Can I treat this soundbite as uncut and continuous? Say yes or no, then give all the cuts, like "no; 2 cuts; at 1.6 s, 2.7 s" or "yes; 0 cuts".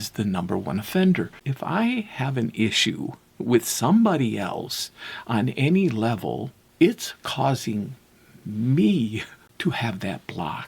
no; 3 cuts; at 1.4 s, 6.6 s, 9.4 s